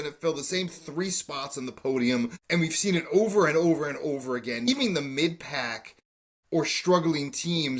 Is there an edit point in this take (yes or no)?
yes